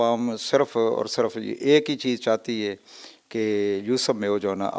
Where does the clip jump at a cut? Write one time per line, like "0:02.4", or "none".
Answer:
none